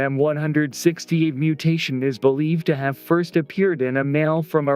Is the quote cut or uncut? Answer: cut